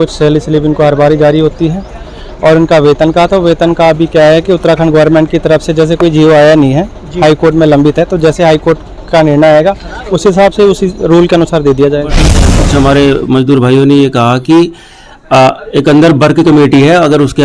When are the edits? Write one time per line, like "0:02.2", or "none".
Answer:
0:12.6